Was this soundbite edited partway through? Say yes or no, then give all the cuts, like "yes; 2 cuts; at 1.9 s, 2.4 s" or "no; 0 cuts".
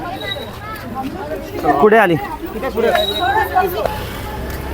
yes; 1 cut; at 3.8 s